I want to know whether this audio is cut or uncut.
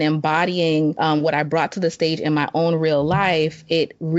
cut